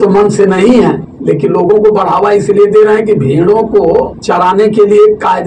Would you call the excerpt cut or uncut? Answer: cut